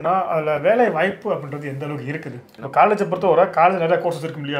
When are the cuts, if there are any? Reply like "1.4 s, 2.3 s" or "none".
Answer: 2.4 s